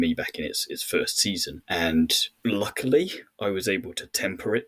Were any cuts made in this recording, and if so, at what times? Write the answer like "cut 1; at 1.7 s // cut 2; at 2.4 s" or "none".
cut 1; at 1.5 s // cut 2; at 2.3 s